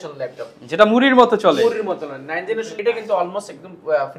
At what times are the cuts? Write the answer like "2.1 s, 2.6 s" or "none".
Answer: 2.7 s